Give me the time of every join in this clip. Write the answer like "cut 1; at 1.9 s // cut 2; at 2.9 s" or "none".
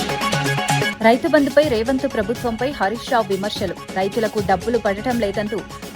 cut 1; at 0.9 s